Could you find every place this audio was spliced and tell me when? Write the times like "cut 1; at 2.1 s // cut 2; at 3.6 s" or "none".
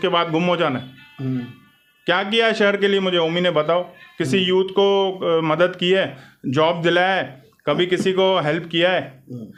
none